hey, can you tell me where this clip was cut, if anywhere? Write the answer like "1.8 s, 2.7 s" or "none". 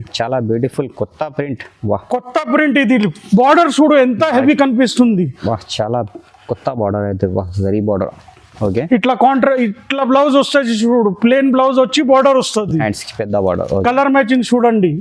none